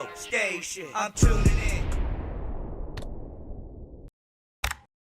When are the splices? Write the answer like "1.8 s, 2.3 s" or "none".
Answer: 4.0 s